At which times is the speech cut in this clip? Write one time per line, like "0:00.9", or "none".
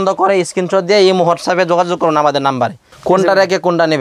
0:02.9

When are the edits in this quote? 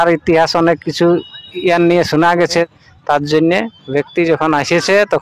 0:02.7

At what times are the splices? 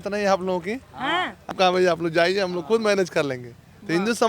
0:01.5

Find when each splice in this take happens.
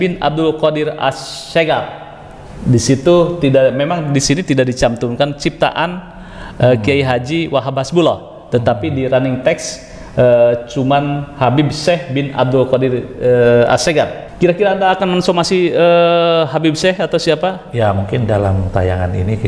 0:14.2

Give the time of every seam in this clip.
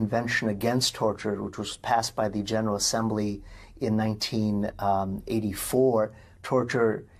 none

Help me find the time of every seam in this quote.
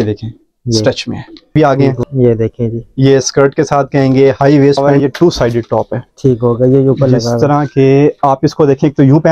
0:01.5
0:04.9

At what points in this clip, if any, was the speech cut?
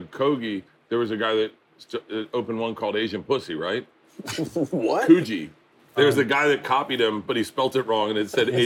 0:05.9

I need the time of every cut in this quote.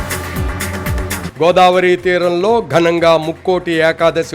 0:01.3

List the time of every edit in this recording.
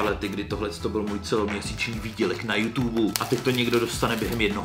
none

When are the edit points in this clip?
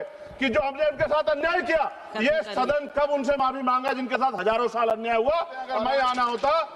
0:05.7

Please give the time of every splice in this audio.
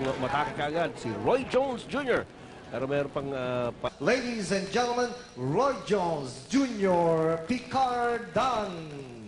none

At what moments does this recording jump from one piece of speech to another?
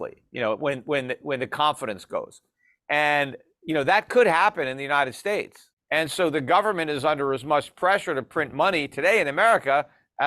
0:05.8

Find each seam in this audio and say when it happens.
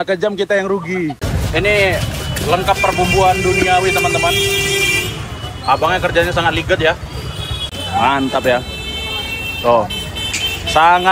0:01.2
0:07.7

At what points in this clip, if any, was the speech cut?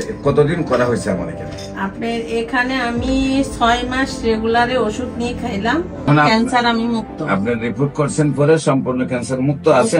0:03.4
0:06.1

